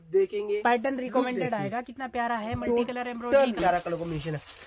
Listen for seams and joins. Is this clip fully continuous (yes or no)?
no